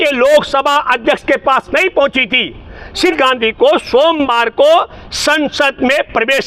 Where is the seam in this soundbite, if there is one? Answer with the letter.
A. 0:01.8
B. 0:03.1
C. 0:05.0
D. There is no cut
B